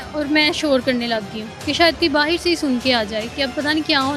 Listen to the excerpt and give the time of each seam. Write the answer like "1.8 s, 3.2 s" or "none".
none